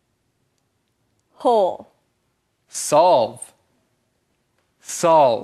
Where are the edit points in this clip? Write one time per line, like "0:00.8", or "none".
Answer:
0:01.7